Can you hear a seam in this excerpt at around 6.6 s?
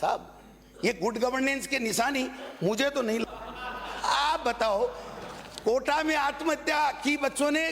no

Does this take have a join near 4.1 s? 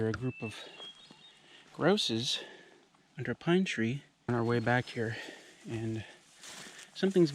yes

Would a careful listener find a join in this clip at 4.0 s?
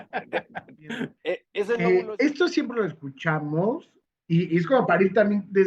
no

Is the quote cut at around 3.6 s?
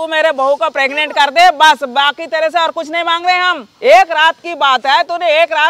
yes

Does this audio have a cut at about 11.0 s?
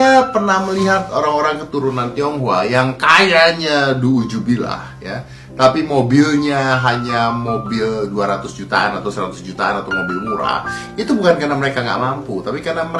no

